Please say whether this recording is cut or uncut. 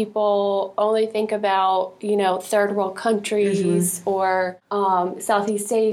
uncut